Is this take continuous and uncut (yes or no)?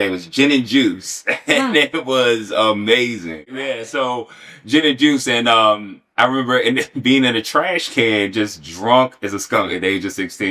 no